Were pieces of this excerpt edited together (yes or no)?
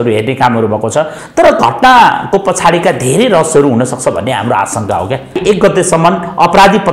yes